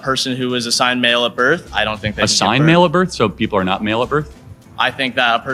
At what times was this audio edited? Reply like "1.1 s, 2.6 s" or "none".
none